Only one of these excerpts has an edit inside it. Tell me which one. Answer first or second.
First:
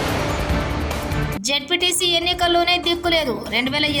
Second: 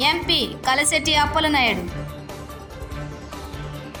first